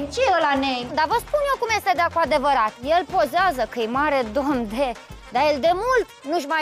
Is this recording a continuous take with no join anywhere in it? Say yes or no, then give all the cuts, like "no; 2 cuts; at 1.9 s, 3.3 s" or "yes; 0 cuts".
no; 2 cuts; at 0.9 s, 5.1 s